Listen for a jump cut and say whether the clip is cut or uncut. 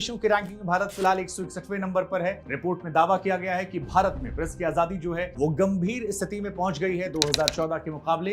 uncut